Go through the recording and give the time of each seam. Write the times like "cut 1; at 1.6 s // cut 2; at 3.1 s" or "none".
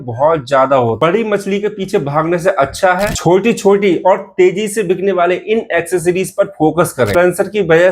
cut 1; at 1.0 s // cut 2; at 7.1 s